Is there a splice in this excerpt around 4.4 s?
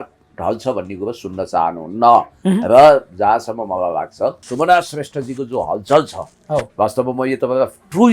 yes; 1 cut; at 4.4 s

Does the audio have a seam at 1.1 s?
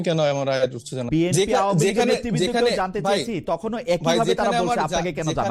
yes; 1 cut; at 1.1 s

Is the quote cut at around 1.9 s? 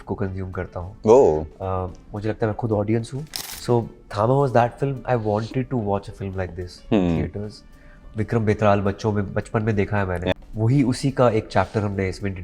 no; 3 cuts; at 3.3 s, 8.0 s, 10.3 s

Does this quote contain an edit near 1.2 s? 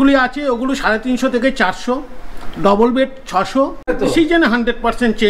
no; 1 cut; at 3.9 s

